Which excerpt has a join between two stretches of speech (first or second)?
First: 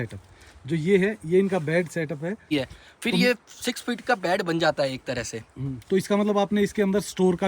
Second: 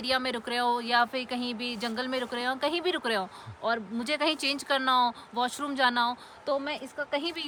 first